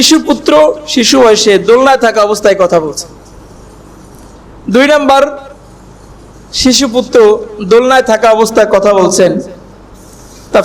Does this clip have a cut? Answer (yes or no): no